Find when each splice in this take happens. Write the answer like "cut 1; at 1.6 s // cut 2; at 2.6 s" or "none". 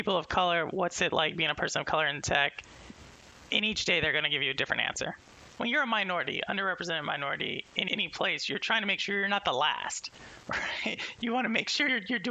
cut 1; at 5.6 s